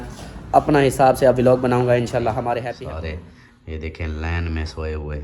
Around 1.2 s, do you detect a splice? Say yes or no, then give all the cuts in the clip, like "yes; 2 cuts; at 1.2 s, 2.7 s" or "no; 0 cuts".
no; 1 cut; at 2.7 s